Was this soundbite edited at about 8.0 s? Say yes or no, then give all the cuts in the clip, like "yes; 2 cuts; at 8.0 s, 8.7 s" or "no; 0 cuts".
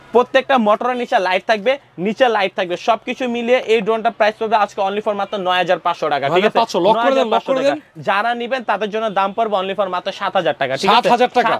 no; 0 cuts